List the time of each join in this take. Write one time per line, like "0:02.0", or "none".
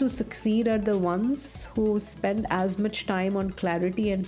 none